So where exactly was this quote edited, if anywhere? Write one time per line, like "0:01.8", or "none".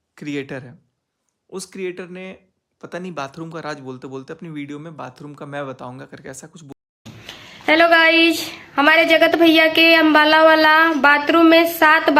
0:06.7